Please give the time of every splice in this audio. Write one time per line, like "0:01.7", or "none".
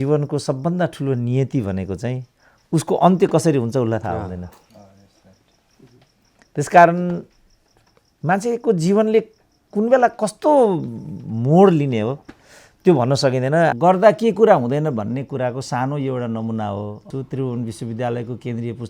0:13.7
0:17.1